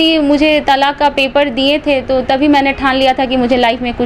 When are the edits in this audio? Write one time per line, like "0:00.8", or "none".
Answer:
none

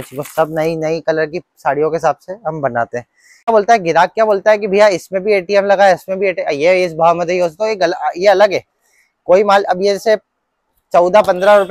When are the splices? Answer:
0:03.4

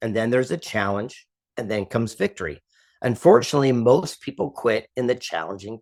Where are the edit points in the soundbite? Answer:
none

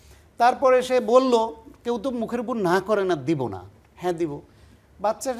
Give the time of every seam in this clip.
none

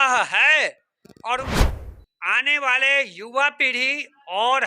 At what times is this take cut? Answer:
0:01.5

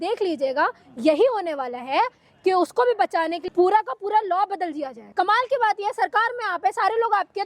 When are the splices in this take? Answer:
0:03.4
0:05.0

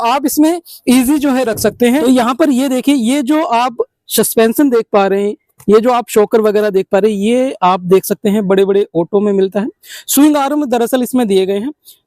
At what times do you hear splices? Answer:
0:02.0

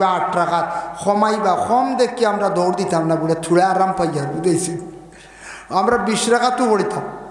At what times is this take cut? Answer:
none

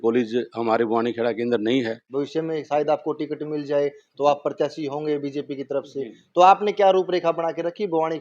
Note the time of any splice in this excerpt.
0:02.0

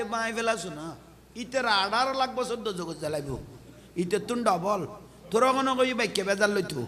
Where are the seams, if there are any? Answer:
none

